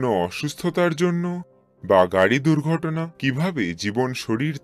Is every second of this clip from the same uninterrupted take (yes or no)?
no